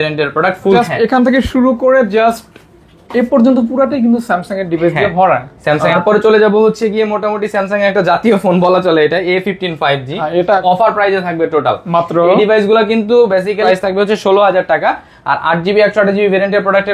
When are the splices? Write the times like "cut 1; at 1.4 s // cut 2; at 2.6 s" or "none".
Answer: cut 1; at 0.8 s // cut 2; at 5.9 s // cut 3; at 10.6 s // cut 4; at 13.6 s